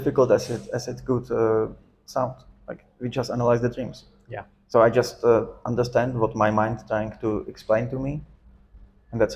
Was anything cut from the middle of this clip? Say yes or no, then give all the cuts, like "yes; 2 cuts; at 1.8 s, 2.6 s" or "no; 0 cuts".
no; 0 cuts